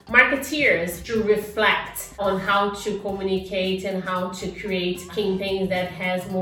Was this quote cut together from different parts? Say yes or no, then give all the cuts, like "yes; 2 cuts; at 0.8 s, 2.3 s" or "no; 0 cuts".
yes; 3 cuts; at 1.0 s, 2.1 s, 5.1 s